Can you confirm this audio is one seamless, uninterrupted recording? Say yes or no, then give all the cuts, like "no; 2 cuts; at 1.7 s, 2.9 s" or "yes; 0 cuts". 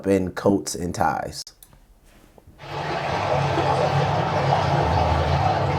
yes; 0 cuts